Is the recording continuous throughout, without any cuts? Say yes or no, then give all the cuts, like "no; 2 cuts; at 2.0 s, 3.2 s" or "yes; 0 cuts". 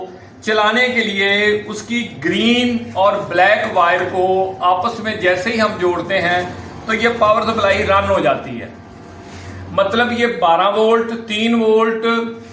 yes; 0 cuts